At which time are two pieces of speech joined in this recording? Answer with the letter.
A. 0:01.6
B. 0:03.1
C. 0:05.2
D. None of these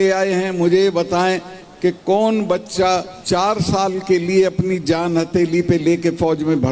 B